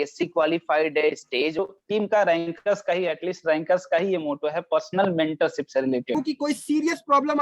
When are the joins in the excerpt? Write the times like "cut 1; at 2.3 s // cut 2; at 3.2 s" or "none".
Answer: cut 1; at 1.6 s // cut 2; at 6.1 s